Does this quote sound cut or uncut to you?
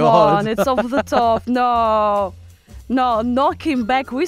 uncut